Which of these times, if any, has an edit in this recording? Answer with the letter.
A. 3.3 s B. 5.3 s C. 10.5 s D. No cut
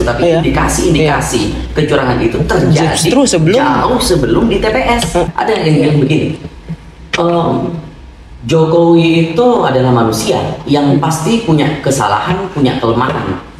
B